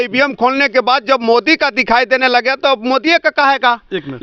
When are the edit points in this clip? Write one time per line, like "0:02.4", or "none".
none